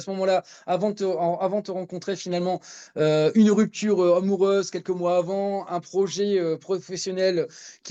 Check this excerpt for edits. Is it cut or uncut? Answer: uncut